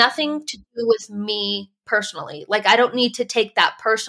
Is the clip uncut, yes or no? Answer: yes